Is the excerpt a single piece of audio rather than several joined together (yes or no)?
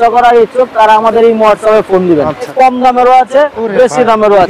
no